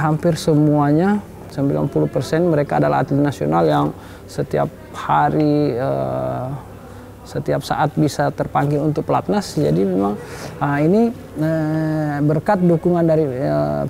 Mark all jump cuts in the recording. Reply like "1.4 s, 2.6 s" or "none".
none